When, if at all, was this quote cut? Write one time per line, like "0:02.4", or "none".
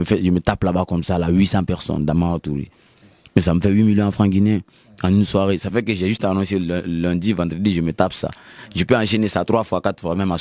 none

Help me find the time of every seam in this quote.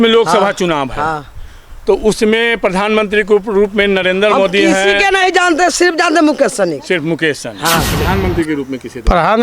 0:07.9

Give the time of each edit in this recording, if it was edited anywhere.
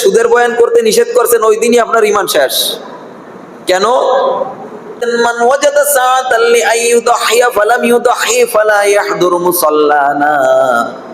0:05.1

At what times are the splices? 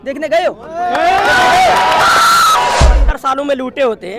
0:02.8

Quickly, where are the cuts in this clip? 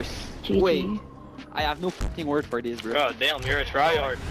none

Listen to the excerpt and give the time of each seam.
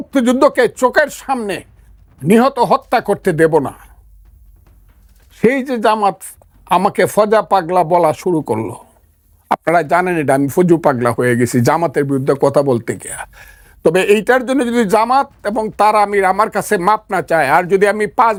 none

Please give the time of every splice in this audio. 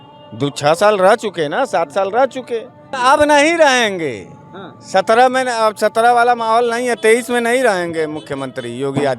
0:02.9

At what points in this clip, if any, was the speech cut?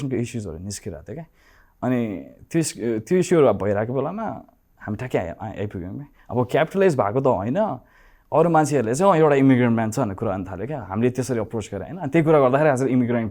none

